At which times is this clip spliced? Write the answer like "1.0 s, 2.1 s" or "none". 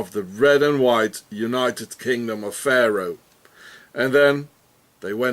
2.5 s

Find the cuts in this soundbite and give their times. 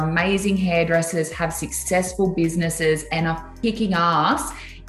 3.6 s

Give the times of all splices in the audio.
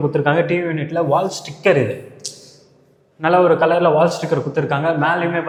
none

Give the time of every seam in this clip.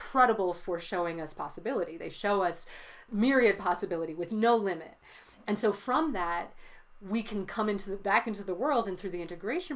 none

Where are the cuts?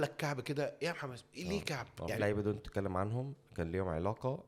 2.2 s

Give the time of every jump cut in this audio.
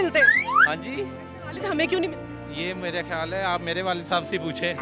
none

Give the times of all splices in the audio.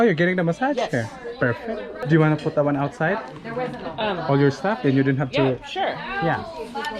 2.0 s

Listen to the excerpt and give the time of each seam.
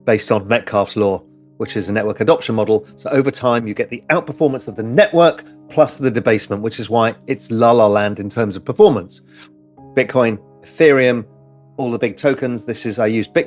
none

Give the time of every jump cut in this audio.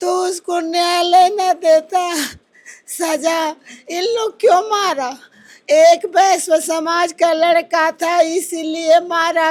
none

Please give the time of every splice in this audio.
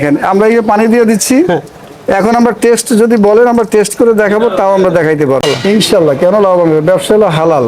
5.4 s

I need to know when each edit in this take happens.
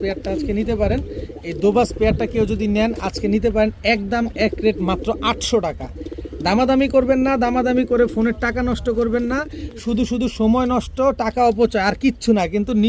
none

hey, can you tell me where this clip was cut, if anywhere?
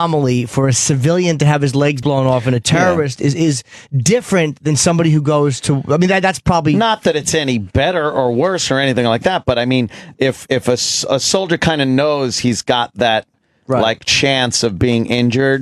7.6 s

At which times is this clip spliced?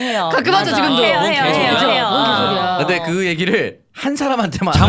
none

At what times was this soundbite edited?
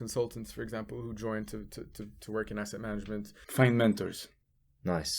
3.4 s

